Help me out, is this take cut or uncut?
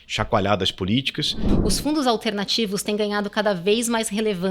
cut